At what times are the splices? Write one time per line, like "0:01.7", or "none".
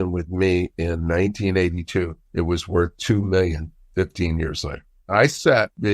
0:02.2
0:05.1